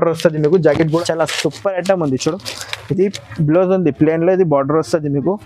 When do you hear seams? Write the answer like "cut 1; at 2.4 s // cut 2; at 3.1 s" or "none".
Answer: cut 1; at 1.0 s